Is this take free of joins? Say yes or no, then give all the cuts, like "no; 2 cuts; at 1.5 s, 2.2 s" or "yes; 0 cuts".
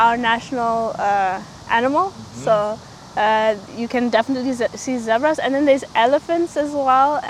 yes; 0 cuts